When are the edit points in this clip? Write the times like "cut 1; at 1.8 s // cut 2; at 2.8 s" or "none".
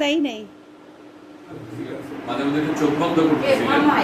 cut 1; at 2.1 s